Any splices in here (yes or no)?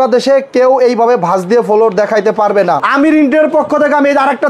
yes